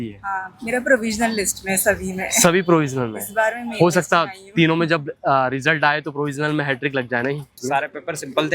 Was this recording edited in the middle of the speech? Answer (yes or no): yes